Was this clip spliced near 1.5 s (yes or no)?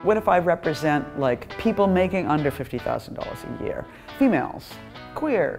yes